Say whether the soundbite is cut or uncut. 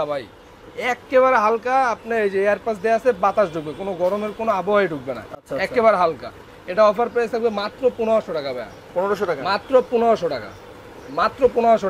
uncut